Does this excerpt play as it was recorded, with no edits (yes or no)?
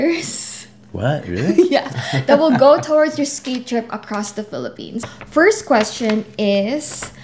no